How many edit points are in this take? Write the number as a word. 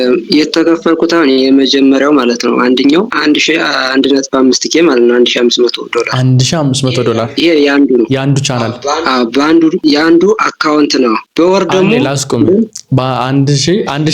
three